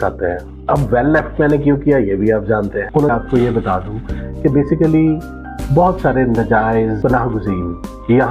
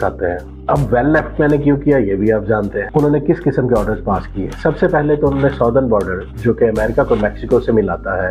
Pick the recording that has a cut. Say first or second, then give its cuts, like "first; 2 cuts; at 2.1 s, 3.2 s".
first; 1 cut; at 3.1 s